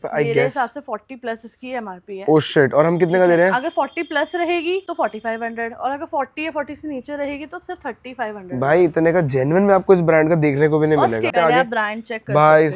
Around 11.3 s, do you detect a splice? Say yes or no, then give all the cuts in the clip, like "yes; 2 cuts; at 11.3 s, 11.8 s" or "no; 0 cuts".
yes; 2 cuts; at 4.9 s, 11.3 s